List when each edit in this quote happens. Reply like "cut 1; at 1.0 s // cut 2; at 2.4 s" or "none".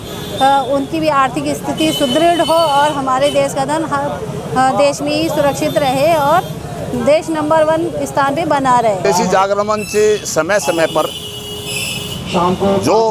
none